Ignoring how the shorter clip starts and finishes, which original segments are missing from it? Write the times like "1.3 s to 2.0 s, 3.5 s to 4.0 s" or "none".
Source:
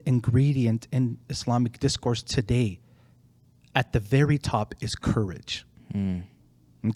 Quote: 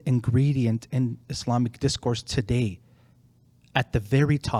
none